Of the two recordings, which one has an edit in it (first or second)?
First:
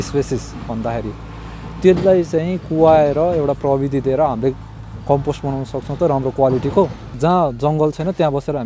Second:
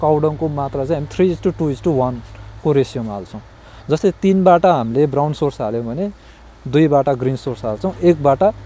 first